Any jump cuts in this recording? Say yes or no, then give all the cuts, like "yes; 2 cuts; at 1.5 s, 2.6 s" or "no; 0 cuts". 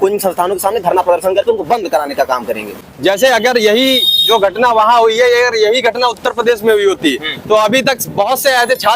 yes; 1 cut; at 2.7 s